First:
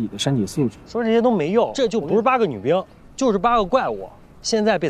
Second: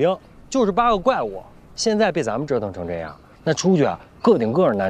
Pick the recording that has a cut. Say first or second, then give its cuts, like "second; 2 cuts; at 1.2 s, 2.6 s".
first; 2 cuts; at 0.9 s, 1.7 s